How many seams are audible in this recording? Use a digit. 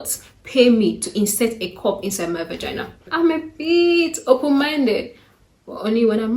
1